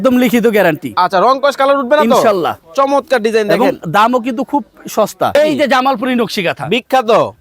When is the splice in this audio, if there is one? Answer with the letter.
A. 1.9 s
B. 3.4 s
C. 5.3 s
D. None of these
C